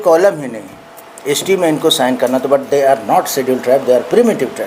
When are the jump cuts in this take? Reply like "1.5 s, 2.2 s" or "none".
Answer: none